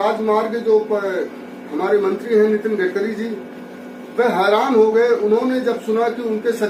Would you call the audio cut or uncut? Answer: uncut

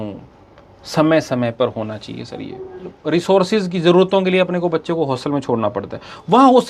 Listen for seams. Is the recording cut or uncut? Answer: cut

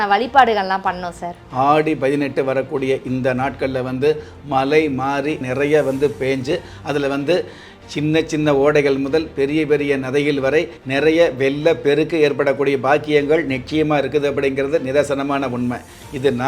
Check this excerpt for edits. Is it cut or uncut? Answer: cut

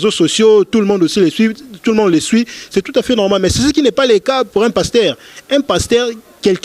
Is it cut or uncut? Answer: uncut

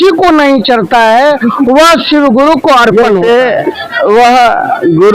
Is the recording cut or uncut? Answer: cut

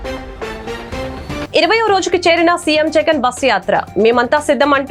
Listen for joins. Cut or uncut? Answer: uncut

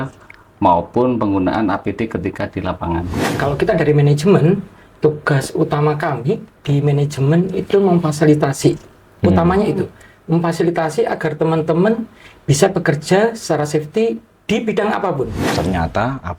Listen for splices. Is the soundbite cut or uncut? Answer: cut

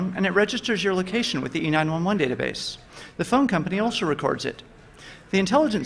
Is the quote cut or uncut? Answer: cut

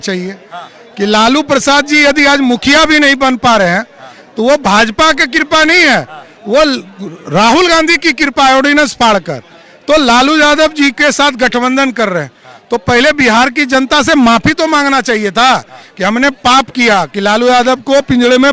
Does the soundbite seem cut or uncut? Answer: uncut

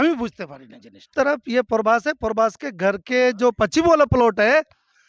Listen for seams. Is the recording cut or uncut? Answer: cut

